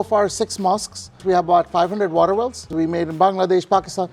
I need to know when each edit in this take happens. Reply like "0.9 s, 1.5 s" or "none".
1.2 s, 2.7 s